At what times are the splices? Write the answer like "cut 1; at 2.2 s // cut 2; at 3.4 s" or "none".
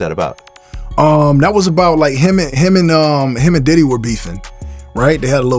none